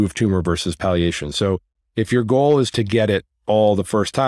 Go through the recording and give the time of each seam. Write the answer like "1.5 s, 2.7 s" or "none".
2.7 s